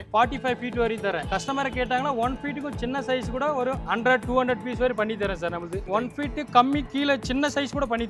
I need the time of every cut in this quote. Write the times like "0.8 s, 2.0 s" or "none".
none